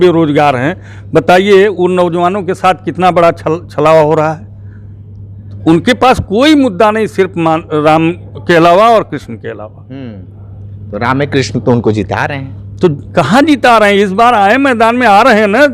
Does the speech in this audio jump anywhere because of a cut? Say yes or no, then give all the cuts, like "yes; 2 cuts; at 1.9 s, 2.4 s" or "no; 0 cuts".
no; 0 cuts